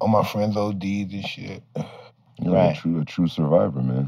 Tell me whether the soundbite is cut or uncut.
uncut